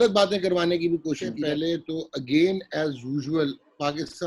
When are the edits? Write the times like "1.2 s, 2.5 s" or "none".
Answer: 1.3 s